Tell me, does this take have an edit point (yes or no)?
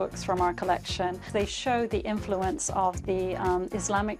yes